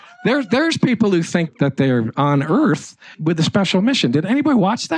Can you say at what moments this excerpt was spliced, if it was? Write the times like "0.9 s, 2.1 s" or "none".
1.5 s, 3.2 s